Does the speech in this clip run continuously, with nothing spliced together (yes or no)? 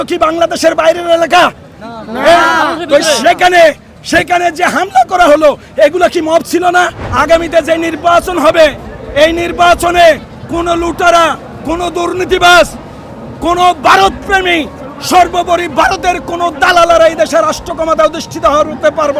no